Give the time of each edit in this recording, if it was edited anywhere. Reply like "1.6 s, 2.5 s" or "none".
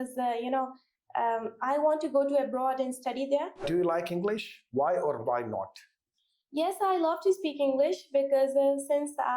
3.7 s